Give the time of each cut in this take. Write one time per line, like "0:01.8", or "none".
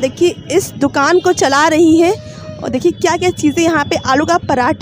none

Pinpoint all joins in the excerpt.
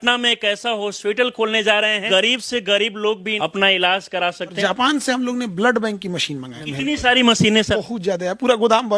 0:02.0
0:03.3
0:04.6
0:06.6
0:07.7

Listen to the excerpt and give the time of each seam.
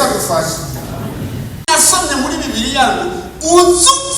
0:01.6

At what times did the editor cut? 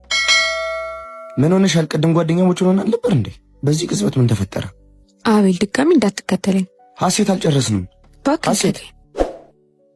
0:09.0

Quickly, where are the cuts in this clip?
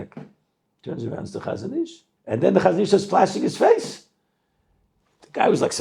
0:02.1

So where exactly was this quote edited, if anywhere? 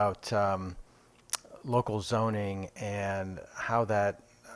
none

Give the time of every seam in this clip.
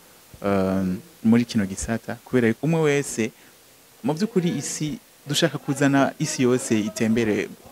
0:02.6

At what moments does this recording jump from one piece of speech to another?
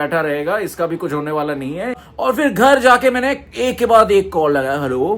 0:02.0

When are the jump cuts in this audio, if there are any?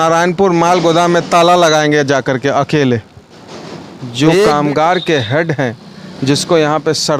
0:04.5

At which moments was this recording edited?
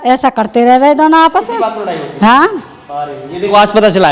none

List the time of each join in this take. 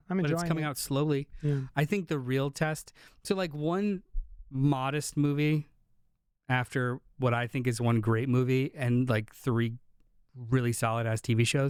none

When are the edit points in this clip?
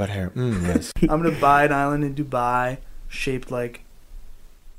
0:00.9

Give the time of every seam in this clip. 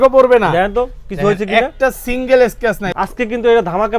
0:02.8

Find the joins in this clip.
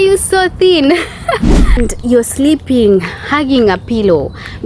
0:01.8

